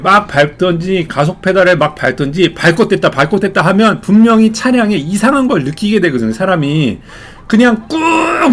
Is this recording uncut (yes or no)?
yes